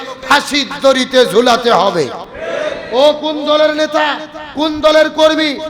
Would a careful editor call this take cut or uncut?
uncut